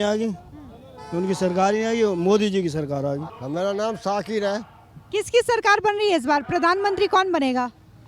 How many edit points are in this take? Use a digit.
1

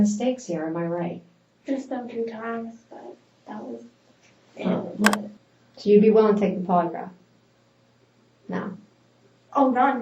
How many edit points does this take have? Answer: 1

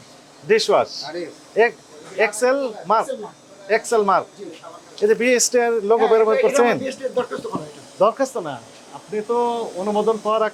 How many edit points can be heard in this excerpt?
0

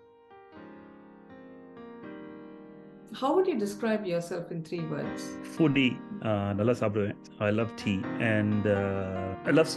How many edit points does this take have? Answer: 0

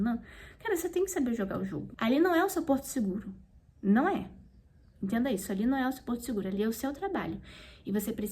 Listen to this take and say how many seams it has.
1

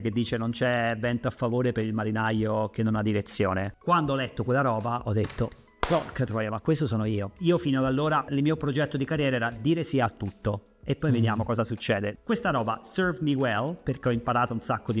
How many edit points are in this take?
3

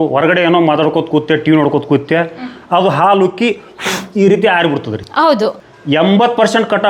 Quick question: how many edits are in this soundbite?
1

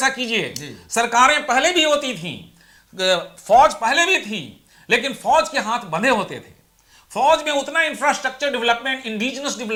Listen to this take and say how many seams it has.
0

